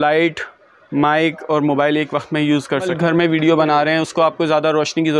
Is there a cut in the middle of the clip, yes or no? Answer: yes